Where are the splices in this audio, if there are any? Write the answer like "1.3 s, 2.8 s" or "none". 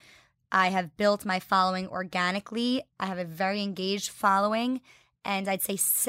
none